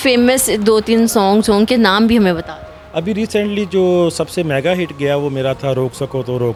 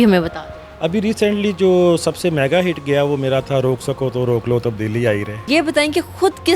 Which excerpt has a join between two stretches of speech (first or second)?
second